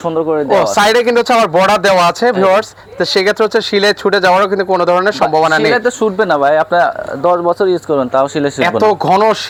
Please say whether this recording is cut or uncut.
uncut